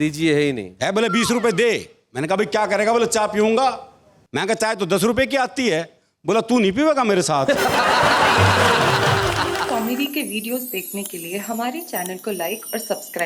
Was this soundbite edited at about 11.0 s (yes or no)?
no